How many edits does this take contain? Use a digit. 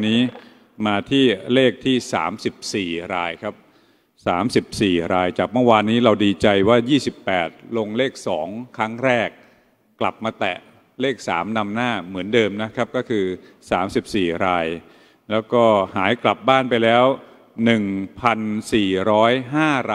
0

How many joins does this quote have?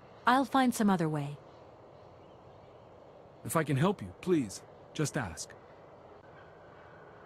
3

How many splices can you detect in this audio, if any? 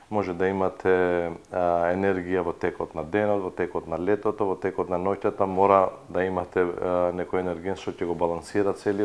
0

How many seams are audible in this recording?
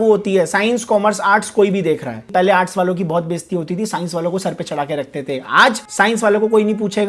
2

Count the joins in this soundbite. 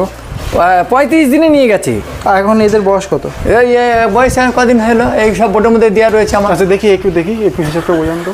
0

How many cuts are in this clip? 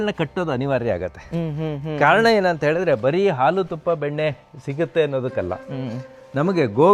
0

